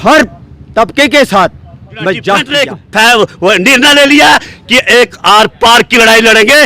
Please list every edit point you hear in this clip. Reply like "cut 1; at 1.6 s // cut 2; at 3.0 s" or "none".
cut 1; at 2.5 s